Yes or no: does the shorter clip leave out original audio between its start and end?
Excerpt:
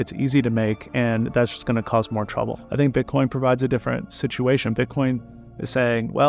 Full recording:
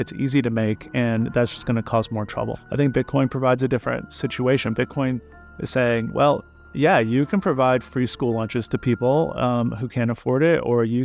no